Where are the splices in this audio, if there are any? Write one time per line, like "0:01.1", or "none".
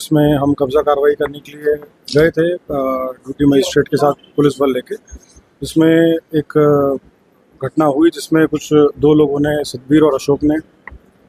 none